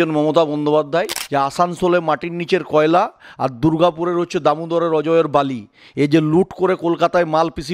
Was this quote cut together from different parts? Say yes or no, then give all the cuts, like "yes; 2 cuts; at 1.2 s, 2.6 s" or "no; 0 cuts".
yes; 1 cut; at 1.2 s